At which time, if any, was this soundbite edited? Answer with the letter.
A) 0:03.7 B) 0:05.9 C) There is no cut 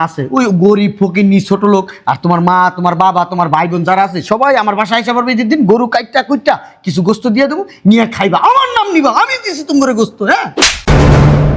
C